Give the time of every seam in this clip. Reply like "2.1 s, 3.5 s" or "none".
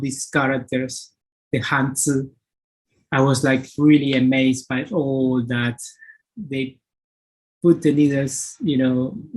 6.3 s